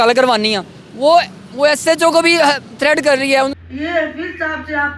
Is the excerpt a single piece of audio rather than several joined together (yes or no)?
no